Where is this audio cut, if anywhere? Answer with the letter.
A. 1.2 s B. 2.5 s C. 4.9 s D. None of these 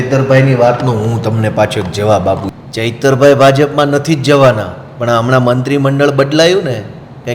B